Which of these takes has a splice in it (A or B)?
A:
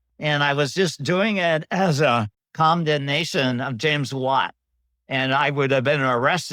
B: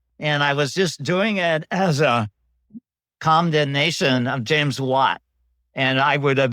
A